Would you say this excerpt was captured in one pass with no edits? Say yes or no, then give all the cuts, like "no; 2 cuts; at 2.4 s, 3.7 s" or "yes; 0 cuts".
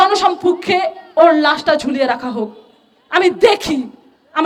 yes; 0 cuts